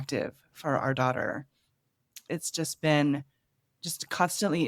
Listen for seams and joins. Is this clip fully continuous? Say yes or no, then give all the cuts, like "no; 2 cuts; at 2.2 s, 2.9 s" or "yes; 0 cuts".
yes; 0 cuts